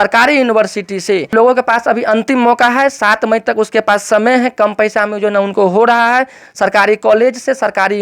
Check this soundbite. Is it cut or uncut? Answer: cut